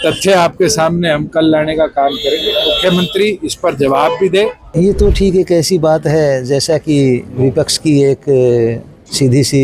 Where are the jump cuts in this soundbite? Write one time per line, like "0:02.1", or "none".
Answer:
0:04.6